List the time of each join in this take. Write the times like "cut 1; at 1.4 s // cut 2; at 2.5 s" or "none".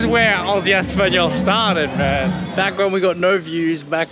cut 1; at 2.5 s